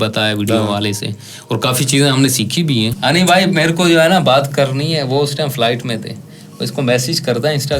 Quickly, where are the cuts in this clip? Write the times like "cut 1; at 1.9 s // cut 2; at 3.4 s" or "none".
cut 1; at 2.9 s